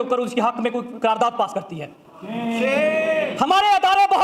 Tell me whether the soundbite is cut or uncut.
uncut